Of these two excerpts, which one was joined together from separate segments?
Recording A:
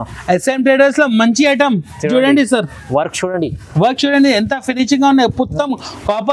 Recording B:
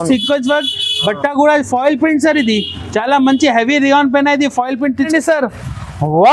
B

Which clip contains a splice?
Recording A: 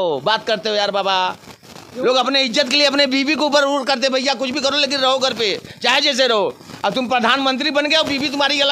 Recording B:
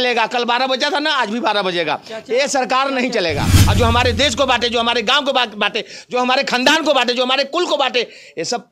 B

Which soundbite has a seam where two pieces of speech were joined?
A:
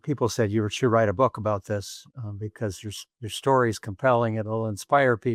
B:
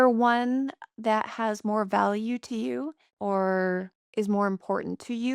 B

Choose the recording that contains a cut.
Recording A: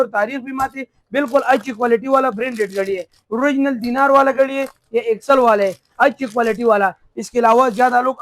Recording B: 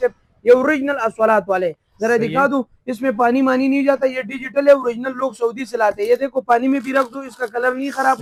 A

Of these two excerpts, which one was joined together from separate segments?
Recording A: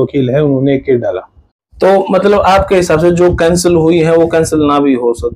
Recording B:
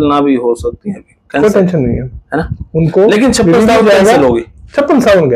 A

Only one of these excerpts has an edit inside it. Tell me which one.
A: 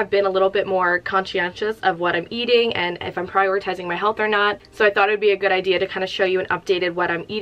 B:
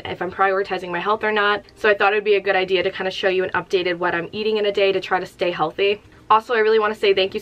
B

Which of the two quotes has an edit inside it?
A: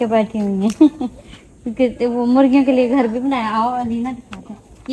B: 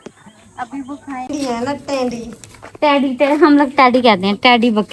B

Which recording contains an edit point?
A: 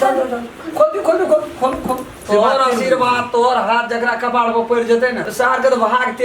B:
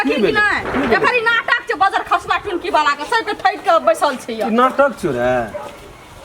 A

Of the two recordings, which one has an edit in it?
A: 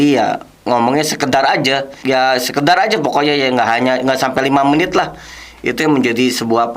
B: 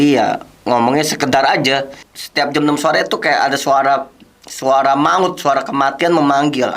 B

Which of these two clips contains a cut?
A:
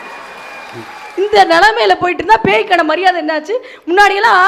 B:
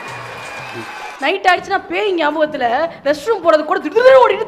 B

